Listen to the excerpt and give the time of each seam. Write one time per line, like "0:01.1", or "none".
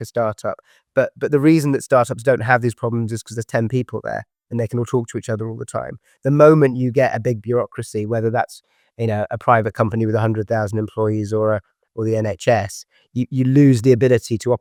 none